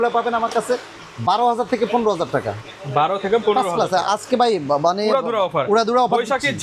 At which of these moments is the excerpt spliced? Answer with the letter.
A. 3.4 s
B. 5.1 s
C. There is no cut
C